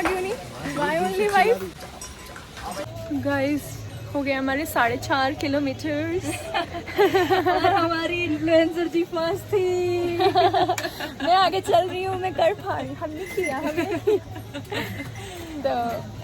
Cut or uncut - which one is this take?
uncut